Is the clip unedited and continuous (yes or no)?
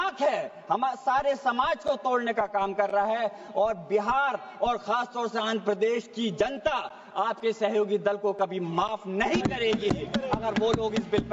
yes